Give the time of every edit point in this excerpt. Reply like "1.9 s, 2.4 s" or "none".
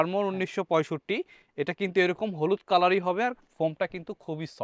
none